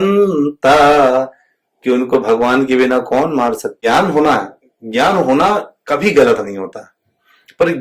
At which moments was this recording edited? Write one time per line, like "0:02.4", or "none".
0:03.7